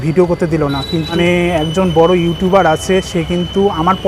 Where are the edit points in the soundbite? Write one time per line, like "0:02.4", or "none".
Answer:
0:01.1